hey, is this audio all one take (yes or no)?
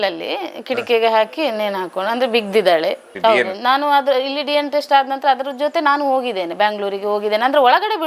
no